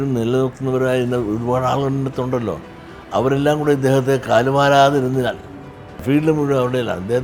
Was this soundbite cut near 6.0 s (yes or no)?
yes